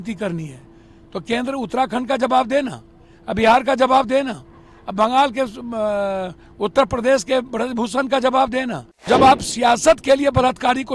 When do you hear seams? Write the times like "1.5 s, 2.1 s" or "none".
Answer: 9.1 s